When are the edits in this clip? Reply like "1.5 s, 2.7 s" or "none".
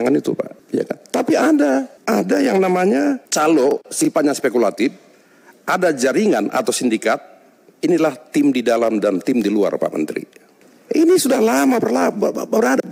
none